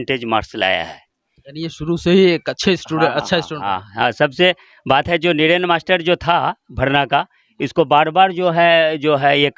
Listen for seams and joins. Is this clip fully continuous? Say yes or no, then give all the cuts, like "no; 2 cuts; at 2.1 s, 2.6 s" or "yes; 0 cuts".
yes; 0 cuts